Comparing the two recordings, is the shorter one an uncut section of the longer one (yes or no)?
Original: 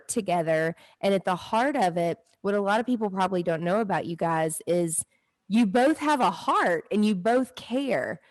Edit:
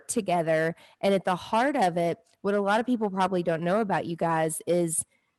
yes